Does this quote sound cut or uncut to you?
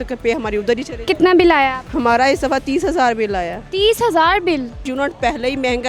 cut